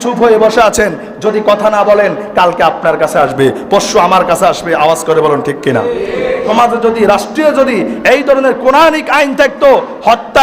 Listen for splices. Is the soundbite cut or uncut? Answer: cut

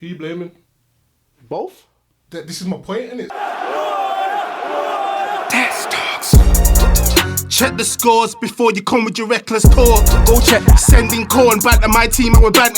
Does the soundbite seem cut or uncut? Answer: cut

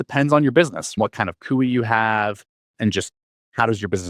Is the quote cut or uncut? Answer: cut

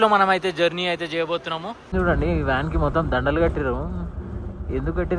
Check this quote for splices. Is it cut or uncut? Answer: cut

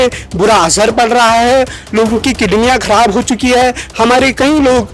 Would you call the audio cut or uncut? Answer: uncut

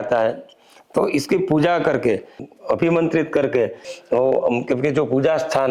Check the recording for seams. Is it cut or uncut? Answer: cut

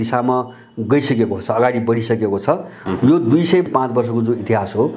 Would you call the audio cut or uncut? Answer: cut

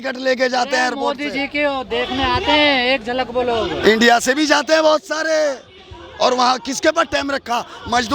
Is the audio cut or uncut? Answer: uncut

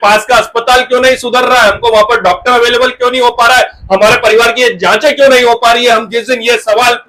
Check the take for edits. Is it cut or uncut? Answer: uncut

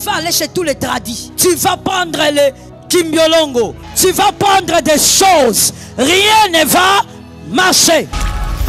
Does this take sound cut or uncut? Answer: cut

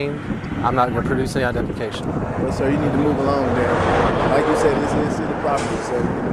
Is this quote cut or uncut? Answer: uncut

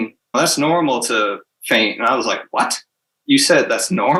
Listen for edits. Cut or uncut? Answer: uncut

